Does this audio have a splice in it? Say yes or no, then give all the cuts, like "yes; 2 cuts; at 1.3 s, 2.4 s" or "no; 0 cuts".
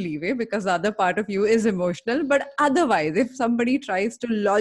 no; 0 cuts